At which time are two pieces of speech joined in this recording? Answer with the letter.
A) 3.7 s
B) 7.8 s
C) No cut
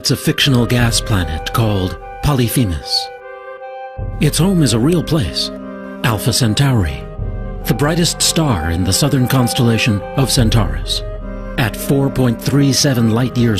A